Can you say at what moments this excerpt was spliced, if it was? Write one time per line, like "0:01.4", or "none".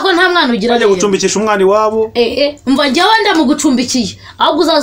none